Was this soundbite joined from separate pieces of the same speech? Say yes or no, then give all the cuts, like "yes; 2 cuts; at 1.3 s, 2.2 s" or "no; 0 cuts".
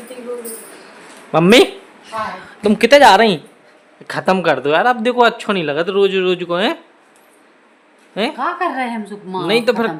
no; 0 cuts